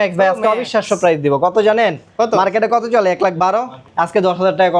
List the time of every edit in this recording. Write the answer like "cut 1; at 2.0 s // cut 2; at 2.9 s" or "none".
cut 1; at 3.8 s